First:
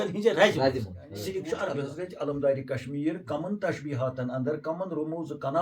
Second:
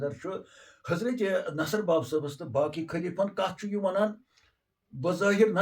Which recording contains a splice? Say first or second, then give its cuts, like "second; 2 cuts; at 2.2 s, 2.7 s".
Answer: first; 1 cut; at 1.7 s